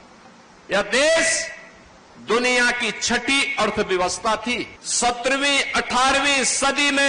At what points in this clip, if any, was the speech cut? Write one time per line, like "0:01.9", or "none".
0:04.8